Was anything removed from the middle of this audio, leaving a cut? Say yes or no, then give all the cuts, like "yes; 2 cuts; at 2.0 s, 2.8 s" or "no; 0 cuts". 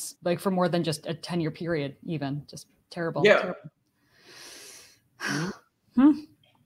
no; 0 cuts